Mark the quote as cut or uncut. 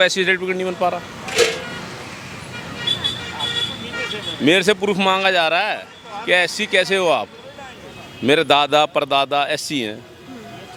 uncut